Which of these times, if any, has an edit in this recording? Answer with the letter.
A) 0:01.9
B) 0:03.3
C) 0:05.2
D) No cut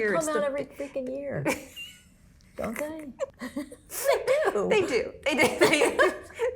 B